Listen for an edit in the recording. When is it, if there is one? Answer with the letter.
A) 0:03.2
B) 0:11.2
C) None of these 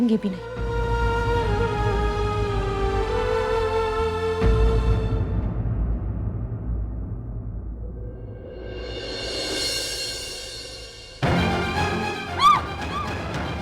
A